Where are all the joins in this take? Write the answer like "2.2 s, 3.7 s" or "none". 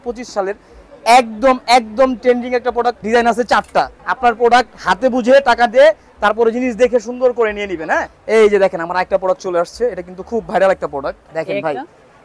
3.0 s, 4.0 s, 8.1 s, 11.2 s

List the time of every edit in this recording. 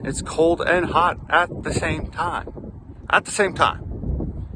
none

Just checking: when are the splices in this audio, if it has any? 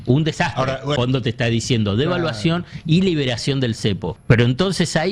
1.0 s, 4.1 s

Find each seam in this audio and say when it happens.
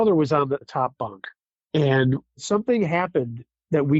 2.4 s

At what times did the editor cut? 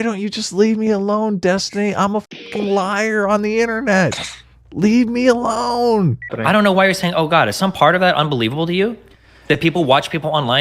6.4 s

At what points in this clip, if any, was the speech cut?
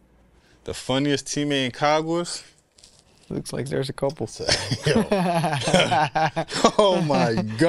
none

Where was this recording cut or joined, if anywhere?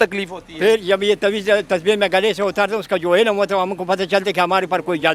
none

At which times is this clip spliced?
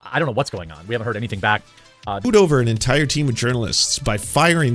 2.2 s

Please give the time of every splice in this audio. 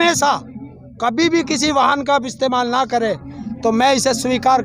none

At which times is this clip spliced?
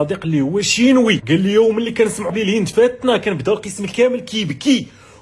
1.2 s, 2.3 s

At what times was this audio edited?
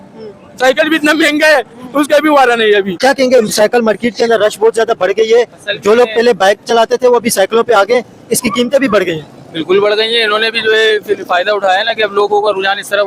none

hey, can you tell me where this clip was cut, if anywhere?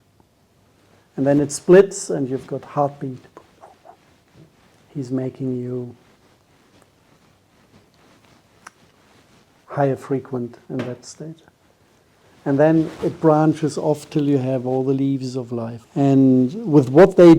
9.6 s, 15.8 s

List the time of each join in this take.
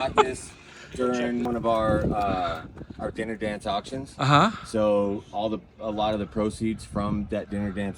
1.5 s

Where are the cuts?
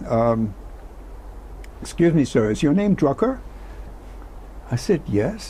none

